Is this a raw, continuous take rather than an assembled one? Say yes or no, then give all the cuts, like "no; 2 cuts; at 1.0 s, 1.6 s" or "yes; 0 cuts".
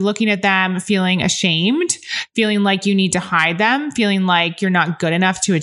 yes; 0 cuts